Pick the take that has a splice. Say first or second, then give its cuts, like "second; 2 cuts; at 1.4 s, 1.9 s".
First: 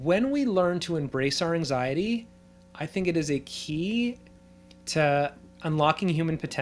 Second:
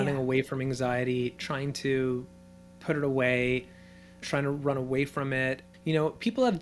second; 2 cuts; at 1.4 s, 5.7 s